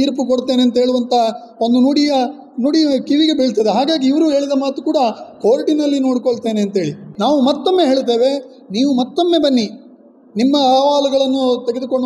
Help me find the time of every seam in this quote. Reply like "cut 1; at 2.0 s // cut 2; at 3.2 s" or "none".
cut 1; at 7.1 s